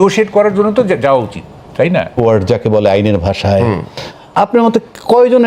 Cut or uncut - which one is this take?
cut